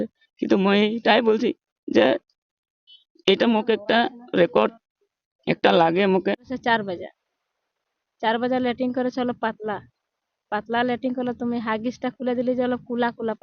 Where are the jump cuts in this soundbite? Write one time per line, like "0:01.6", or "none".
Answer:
0:06.5

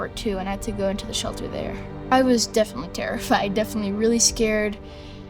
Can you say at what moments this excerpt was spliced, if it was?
0:01.9

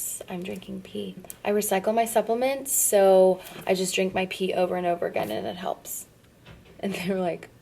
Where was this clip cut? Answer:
0:01.3

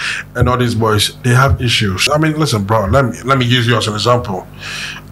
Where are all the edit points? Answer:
0:02.0

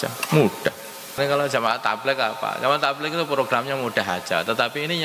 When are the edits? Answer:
0:01.2

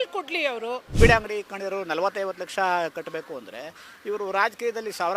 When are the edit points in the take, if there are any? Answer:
0:00.9

